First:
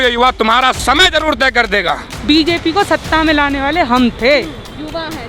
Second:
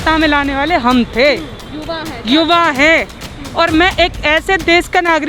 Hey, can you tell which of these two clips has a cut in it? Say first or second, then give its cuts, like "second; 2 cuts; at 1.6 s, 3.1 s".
first; 1 cut; at 2.1 s